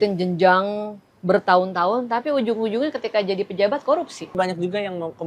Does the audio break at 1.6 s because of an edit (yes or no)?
no